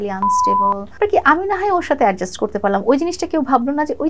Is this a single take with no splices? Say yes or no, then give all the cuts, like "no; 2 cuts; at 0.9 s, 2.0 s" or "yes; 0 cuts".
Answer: no; 1 cut; at 1.0 s